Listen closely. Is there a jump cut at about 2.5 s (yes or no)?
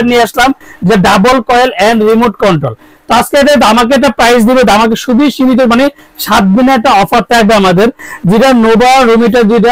no